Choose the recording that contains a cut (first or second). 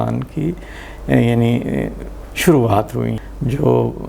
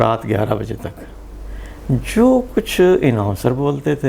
first